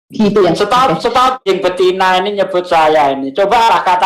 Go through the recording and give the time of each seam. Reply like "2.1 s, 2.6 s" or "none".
1.4 s